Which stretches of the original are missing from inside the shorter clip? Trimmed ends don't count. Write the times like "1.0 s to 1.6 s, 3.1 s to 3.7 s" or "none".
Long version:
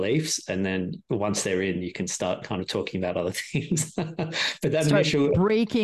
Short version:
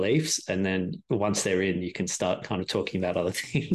none